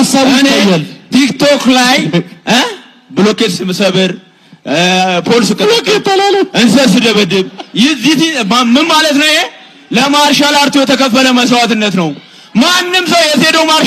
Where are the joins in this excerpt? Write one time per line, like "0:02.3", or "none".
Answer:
none